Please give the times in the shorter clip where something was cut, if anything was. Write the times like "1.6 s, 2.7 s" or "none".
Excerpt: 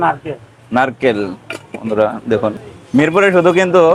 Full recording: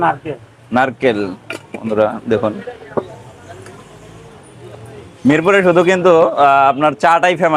2.7 s